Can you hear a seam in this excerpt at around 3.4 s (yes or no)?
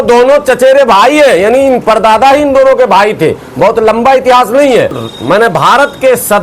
no